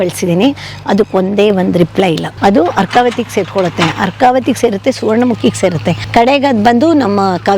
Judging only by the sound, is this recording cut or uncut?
cut